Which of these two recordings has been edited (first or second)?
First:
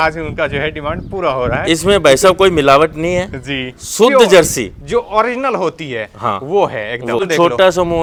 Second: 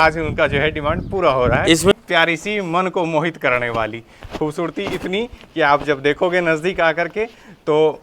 second